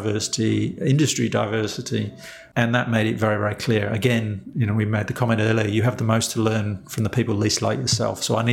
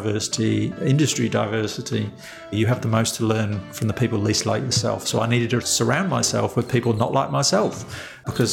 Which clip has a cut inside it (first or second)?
second